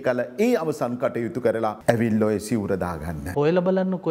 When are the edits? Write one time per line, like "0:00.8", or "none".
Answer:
0:01.8
0:03.3

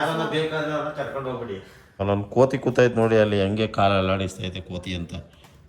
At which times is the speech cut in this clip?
0:02.0

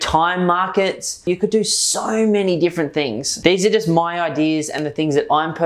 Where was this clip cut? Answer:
0:01.3
0:03.2

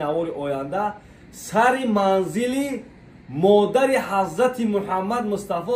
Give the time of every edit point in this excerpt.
none

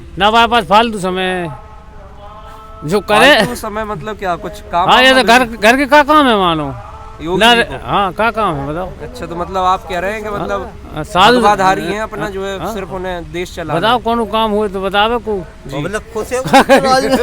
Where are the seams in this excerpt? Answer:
none

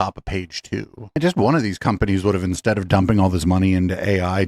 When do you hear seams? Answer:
0:01.2

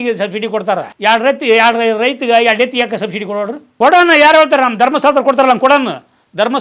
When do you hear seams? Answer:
0:00.9

